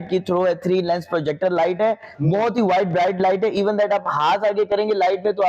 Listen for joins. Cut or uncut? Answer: uncut